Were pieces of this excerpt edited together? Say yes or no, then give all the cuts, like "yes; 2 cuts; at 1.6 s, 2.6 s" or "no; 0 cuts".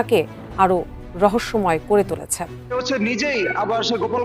yes; 1 cut; at 2.6 s